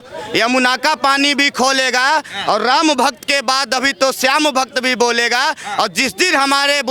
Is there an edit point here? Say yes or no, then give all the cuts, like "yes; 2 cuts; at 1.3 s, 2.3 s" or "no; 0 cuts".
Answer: no; 0 cuts